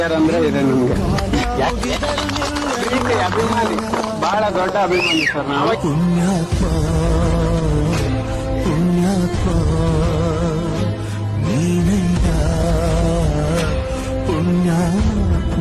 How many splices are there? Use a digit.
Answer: 0